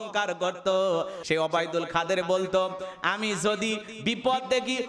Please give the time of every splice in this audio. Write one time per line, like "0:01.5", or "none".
0:01.2